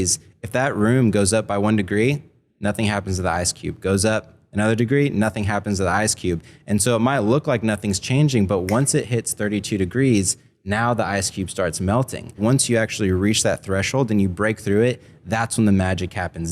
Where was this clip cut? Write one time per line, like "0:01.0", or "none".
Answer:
0:12.4